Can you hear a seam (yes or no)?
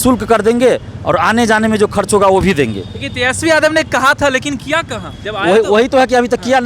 no